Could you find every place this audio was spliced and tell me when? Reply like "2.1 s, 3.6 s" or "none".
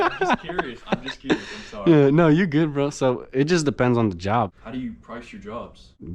4.5 s